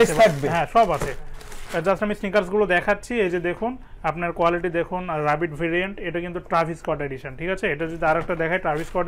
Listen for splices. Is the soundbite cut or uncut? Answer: uncut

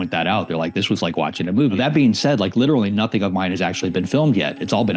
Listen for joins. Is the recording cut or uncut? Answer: cut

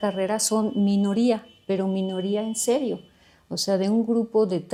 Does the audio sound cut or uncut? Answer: uncut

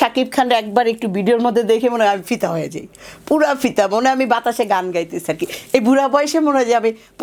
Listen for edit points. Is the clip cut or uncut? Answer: uncut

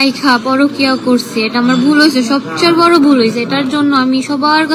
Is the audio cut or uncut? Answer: uncut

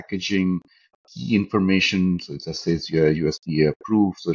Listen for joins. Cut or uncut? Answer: uncut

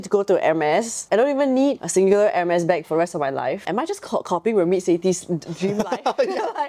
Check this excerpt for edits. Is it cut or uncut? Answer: cut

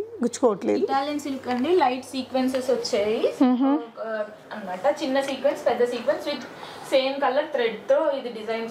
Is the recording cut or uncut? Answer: uncut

